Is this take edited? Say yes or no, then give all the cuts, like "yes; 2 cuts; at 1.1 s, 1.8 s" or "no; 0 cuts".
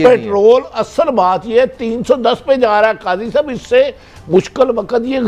no; 0 cuts